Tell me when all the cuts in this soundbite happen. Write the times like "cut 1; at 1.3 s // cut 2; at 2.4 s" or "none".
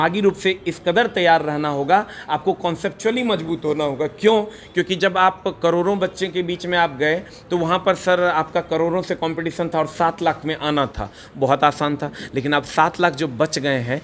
none